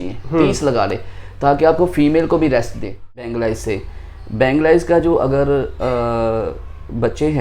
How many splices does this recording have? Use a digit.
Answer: 1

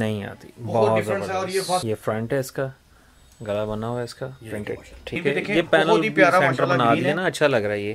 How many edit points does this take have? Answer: 2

